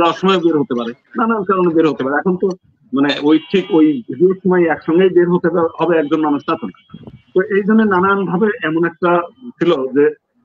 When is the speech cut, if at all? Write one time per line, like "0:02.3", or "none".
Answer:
none